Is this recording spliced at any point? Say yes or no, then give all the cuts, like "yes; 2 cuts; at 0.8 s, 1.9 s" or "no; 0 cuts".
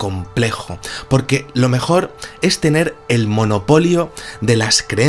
yes; 1 cut; at 2.2 s